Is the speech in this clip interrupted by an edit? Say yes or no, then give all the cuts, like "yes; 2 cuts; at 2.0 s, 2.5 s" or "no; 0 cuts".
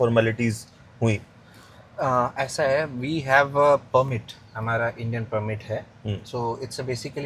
no; 0 cuts